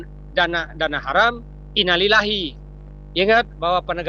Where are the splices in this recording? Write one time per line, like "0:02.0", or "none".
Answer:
0:02.5